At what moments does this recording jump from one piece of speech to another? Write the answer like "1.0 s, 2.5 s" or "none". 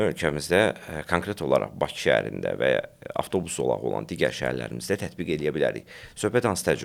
none